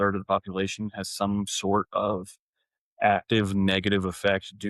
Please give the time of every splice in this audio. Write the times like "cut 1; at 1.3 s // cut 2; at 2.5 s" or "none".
none